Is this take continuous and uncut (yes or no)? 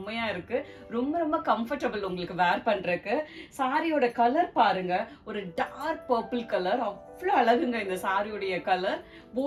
yes